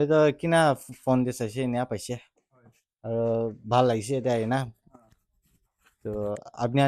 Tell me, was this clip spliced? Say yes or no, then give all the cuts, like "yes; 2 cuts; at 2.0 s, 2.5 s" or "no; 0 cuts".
no; 0 cuts